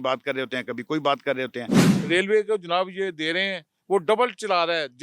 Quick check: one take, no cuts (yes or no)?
no